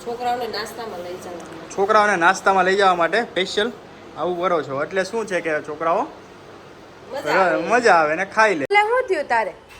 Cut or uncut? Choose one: cut